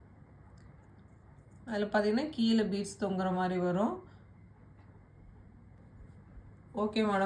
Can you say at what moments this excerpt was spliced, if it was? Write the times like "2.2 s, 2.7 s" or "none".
5.8 s

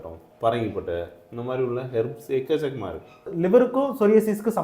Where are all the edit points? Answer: 3.3 s

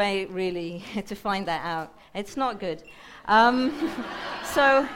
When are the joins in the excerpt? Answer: none

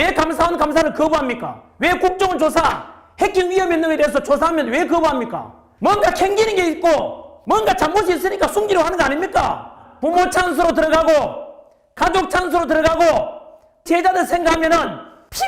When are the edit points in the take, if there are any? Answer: 9.9 s

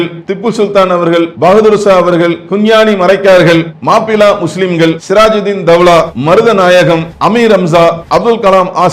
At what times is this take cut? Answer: 1.3 s, 2.4 s, 3.7 s, 5.0 s, 6.1 s, 7.1 s, 8.0 s

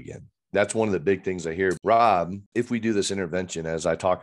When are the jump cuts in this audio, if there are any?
1.8 s, 2.4 s

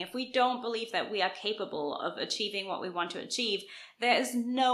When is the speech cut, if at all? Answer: none

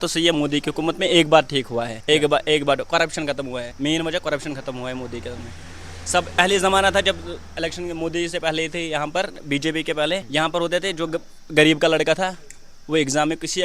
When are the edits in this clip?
1.9 s, 3.7 s, 6.4 s, 10.3 s

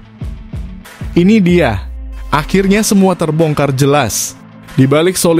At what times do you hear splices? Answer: 1.1 s

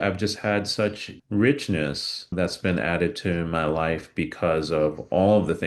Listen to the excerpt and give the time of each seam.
1.1 s, 2.3 s

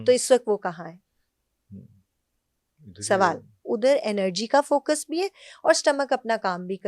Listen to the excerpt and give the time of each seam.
3.6 s

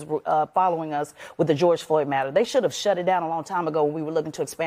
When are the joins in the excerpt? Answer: none

